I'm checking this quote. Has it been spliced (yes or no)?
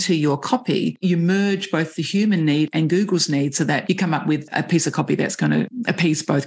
no